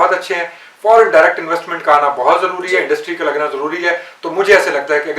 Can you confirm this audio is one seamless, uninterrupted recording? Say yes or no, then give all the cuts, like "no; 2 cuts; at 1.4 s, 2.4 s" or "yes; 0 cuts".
yes; 0 cuts